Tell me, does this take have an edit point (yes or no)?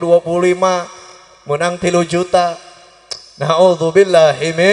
no